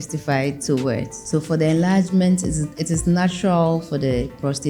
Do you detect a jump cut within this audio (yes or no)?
yes